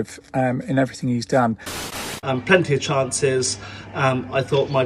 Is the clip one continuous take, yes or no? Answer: no